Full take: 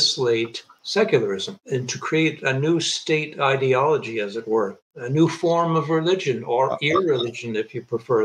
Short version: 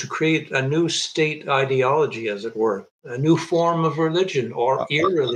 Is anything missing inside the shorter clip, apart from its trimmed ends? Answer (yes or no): no